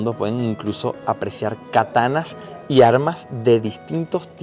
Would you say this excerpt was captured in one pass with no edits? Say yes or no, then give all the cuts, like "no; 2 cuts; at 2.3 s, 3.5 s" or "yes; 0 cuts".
yes; 0 cuts